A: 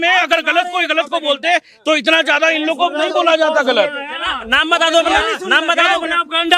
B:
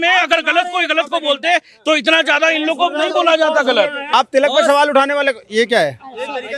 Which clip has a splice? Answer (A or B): B